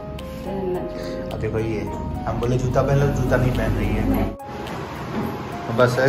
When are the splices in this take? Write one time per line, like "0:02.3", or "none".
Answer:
0:04.4